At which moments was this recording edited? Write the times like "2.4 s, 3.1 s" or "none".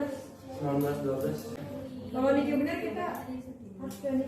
1.5 s